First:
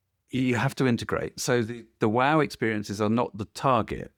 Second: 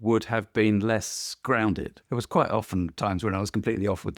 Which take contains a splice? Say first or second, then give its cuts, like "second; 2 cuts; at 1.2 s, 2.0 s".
second; 1 cut; at 1.9 s